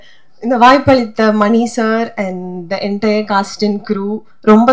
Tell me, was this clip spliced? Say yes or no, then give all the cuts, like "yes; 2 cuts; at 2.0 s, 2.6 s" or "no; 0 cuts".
no; 0 cuts